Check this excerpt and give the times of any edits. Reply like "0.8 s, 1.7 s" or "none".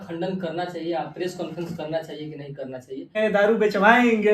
3.2 s